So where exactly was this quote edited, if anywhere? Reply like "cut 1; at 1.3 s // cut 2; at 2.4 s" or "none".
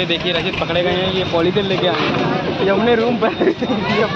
cut 1; at 1.6 s